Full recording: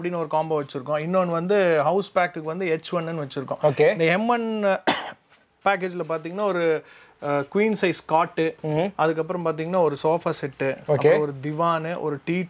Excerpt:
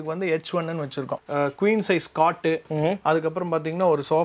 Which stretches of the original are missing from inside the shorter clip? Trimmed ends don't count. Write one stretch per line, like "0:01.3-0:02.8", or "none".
0:03.5-0:07.1